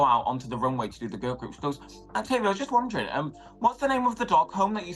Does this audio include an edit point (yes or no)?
no